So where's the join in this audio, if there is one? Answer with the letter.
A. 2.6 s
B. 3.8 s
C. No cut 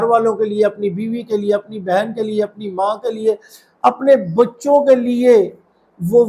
C